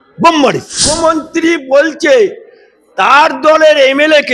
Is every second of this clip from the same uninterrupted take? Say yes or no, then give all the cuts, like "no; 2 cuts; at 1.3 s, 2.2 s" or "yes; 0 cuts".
no; 1 cut; at 0.9 s